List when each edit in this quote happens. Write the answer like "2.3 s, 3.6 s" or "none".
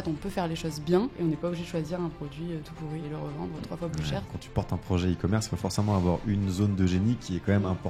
1.1 s, 3.0 s, 4.3 s